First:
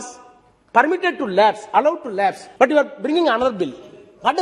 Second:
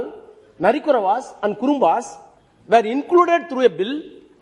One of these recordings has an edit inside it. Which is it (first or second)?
first